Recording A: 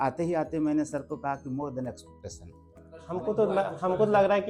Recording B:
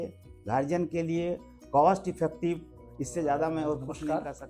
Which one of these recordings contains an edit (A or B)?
A